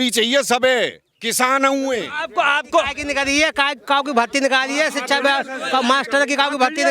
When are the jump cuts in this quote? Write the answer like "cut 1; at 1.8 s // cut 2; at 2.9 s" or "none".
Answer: cut 1; at 2.2 s